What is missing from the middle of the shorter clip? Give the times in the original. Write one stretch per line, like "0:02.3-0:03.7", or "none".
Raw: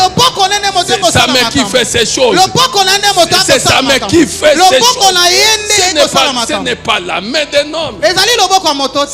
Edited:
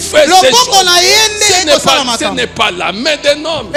none